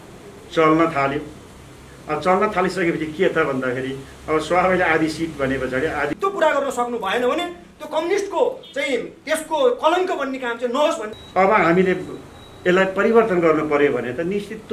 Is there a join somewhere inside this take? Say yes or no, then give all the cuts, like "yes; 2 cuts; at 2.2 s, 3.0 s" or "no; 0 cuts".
yes; 2 cuts; at 6.1 s, 11.1 s